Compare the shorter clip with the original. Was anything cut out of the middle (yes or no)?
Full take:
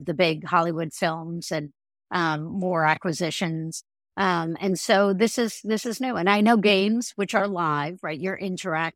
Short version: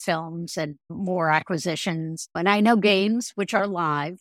yes